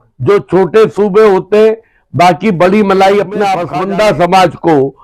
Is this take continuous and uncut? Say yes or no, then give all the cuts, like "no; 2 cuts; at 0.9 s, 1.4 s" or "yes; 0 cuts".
no; 1 cut; at 3.6 s